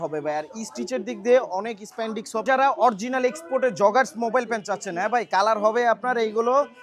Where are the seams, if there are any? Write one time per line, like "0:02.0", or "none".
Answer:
0:02.4